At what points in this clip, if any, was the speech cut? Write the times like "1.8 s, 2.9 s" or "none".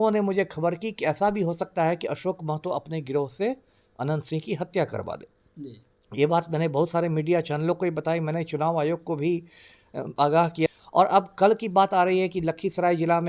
10.7 s